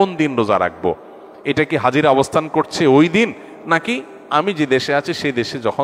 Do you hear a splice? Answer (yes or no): no